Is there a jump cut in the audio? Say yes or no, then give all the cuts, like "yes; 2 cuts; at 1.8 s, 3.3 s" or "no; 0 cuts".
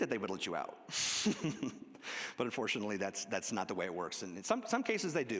no; 0 cuts